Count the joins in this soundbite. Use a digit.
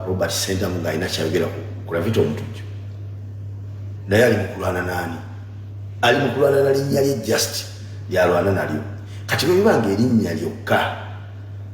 1